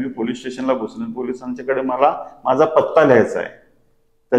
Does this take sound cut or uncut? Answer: uncut